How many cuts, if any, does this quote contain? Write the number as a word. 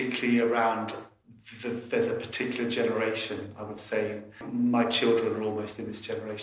one